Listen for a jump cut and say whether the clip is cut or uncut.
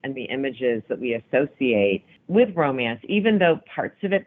cut